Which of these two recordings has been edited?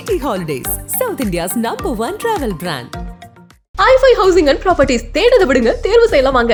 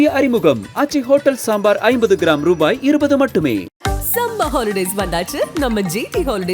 second; 1 cut; at 3.8 s

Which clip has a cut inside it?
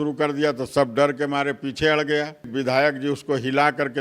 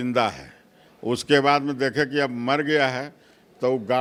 first; 1 cut; at 2.5 s

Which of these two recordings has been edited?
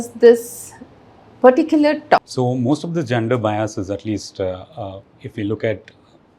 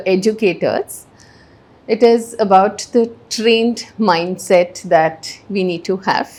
first; 1 cut; at 2.2 s

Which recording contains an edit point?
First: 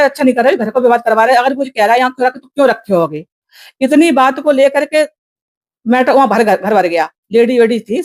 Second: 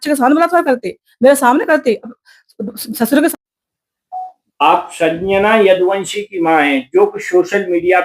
second; 1 cut; at 3.5 s

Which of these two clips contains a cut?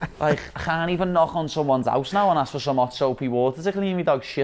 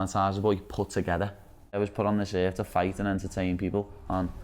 second; 1 cut; at 1.8 s

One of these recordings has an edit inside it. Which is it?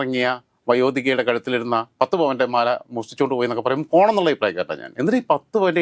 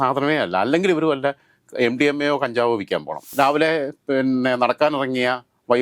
second; 1 cut; at 3.3 s

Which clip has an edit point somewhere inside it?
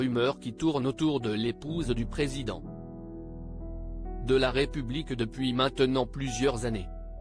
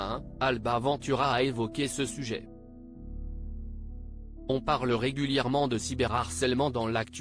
first; 2 cuts; at 2.6 s, 4.1 s

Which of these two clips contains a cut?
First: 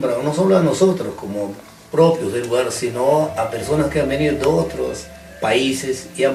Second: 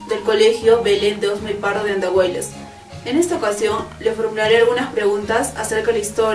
second; 1 cut; at 3.0 s

